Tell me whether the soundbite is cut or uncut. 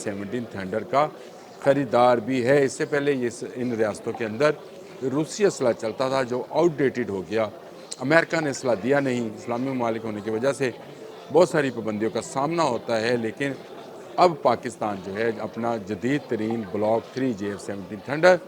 uncut